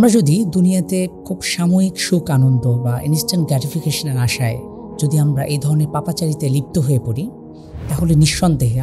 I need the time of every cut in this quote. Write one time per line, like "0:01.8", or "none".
0:01.2